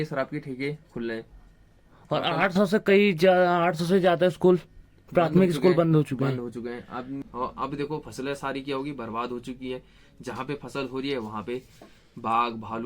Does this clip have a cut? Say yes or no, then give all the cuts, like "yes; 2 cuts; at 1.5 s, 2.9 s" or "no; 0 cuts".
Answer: yes; 1 cut; at 7.3 s